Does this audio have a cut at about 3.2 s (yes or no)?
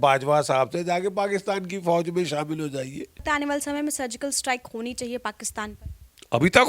yes